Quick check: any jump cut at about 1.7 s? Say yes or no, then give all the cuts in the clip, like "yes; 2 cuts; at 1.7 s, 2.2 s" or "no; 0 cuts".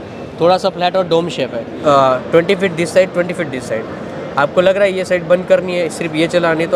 yes; 1 cut; at 1.7 s